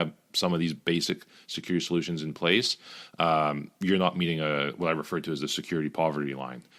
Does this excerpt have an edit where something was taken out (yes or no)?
no